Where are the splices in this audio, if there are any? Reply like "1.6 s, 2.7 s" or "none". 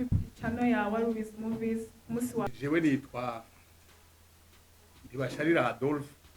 2.5 s